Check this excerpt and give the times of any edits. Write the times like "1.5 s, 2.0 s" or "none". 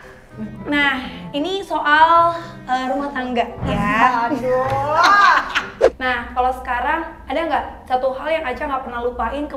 3.4 s, 5.7 s

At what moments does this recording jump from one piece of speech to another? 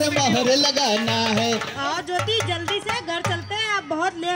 1.7 s

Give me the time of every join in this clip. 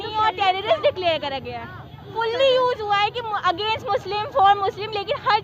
2.0 s

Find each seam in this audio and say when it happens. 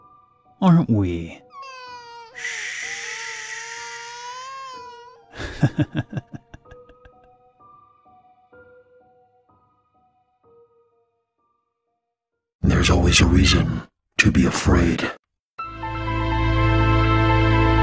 none

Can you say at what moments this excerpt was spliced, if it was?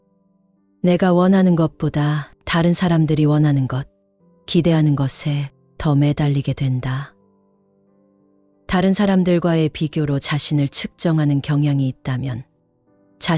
7.1 s, 8.7 s

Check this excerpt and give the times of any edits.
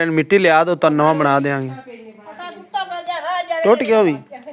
none

